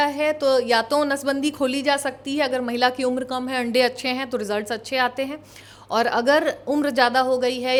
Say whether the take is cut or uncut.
uncut